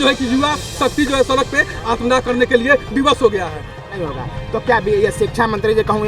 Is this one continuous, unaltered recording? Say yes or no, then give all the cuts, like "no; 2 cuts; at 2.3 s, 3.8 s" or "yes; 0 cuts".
no; 1 cut; at 3.8 s